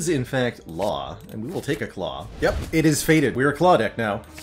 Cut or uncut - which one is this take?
cut